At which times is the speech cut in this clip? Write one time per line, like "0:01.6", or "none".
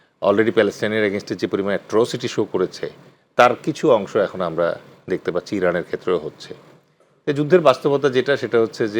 none